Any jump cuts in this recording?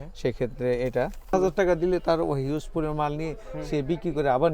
yes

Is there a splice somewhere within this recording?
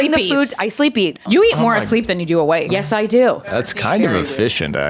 yes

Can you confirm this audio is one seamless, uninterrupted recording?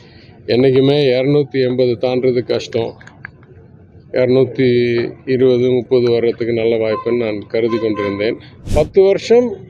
no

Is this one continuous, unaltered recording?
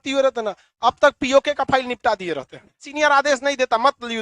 no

